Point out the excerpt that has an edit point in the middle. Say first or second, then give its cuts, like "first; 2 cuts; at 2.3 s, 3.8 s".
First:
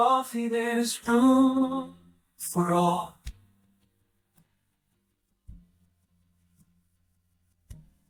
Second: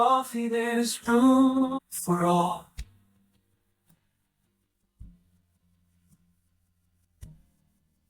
second; 1 cut; at 1.9 s